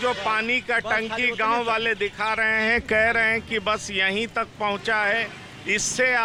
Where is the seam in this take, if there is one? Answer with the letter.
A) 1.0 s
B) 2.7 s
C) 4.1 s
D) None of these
D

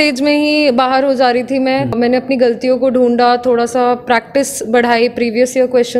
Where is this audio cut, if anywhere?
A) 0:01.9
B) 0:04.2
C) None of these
A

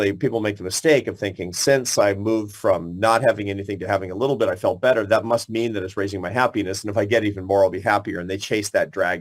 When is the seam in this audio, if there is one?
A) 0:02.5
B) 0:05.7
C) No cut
C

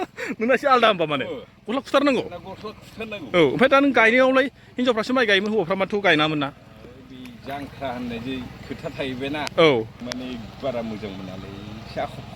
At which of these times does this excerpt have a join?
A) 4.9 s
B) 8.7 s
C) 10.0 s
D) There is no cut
C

